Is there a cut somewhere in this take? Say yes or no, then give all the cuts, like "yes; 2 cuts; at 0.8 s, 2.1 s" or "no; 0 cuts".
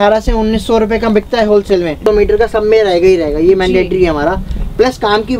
yes; 1 cut; at 2.0 s